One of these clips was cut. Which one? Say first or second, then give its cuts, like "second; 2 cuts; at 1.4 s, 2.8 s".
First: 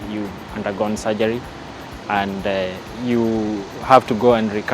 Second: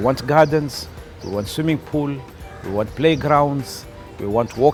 first; 1 cut; at 2.9 s